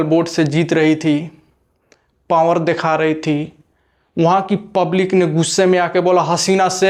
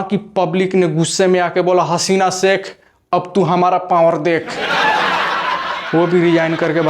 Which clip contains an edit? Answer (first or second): second